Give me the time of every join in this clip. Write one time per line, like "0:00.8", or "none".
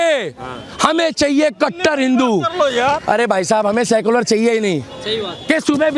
none